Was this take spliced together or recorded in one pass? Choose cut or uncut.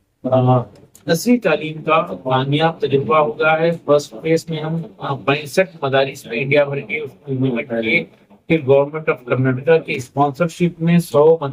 uncut